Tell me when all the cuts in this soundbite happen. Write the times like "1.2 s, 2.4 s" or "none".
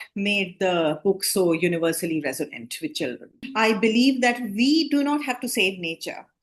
3.5 s